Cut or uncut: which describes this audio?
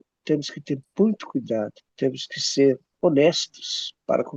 cut